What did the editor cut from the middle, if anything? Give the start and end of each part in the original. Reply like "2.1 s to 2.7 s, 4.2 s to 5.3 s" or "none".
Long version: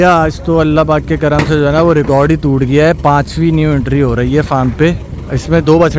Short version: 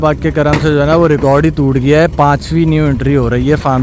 none